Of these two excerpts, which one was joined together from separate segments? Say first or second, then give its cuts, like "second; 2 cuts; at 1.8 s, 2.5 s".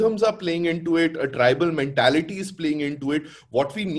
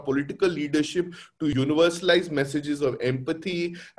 second; 1 cut; at 1.5 s